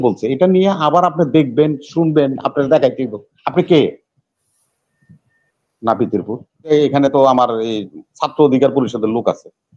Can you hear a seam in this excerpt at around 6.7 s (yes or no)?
yes